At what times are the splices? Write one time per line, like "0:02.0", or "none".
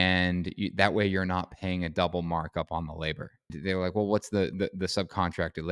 0:03.5